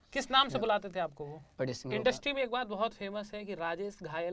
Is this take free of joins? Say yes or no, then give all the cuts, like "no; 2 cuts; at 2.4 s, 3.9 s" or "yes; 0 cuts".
no; 1 cut; at 1.5 s